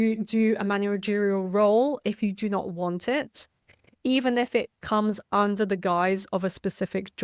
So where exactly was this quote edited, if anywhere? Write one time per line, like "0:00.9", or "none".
none